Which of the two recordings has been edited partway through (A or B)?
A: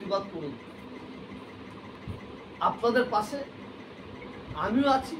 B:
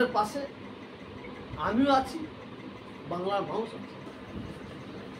B